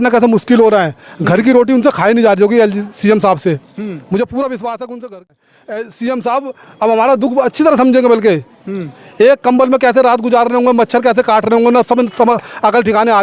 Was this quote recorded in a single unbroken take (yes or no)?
no